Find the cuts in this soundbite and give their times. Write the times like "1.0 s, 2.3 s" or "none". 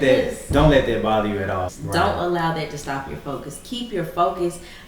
1.6 s